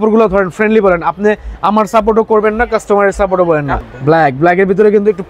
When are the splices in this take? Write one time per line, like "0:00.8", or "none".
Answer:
0:03.8

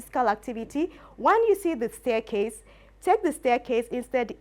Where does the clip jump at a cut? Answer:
0:01.0

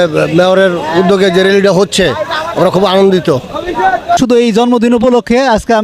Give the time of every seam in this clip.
0:04.2

